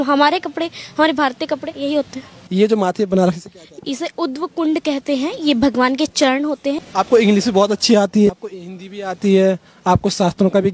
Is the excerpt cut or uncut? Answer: cut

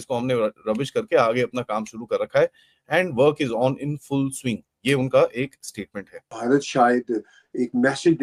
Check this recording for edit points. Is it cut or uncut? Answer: cut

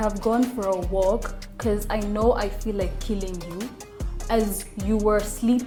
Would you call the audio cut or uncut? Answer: uncut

